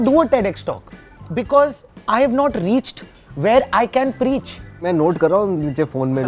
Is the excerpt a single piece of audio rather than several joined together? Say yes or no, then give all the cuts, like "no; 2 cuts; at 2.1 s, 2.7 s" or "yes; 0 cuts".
no; 1 cut; at 4.9 s